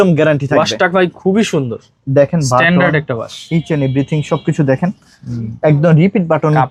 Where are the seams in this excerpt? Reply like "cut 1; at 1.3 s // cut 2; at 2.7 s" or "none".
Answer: none